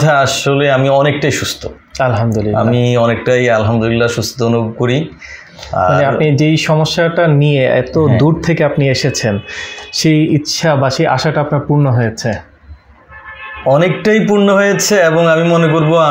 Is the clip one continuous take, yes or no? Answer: yes